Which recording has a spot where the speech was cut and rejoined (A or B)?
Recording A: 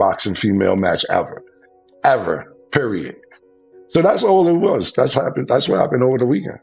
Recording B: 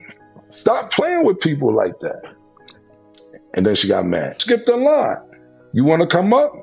B